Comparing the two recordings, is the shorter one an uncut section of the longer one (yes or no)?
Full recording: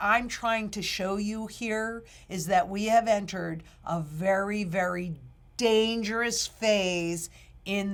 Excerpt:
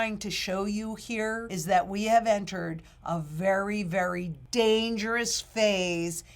no